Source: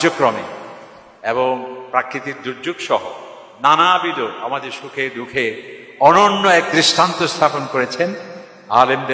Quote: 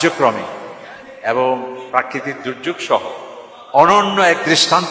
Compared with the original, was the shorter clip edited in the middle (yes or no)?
yes